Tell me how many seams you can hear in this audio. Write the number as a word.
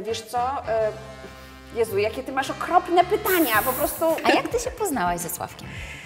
one